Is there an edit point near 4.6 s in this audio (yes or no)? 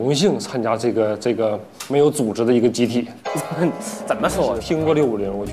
yes